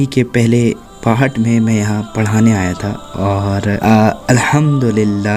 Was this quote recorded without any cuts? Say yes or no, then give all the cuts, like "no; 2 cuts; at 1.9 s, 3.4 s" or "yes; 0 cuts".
no; 1 cut; at 3.8 s